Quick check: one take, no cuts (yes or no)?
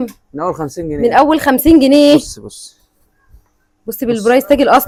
yes